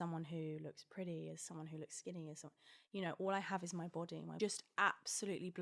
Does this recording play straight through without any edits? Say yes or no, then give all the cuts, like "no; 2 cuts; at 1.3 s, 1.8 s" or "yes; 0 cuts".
no; 1 cut; at 4.3 s